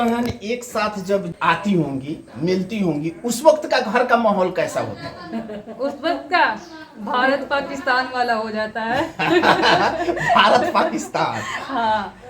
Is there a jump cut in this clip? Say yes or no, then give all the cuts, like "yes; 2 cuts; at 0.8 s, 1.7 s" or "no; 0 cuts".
yes; 1 cut; at 1.3 s